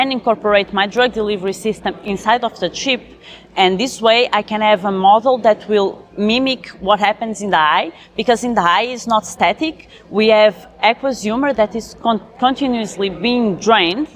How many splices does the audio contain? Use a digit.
1